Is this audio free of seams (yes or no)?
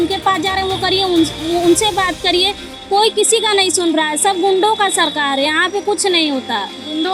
yes